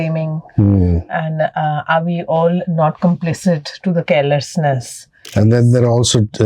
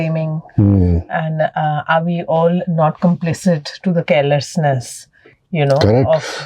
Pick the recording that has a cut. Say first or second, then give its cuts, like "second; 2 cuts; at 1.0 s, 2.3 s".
first; 1 cut; at 5.3 s